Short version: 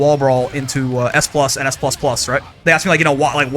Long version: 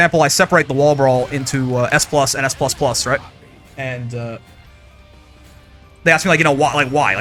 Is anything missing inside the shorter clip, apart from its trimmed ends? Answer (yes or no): yes